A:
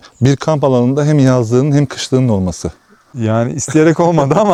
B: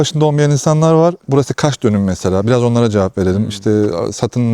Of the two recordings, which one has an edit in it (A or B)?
B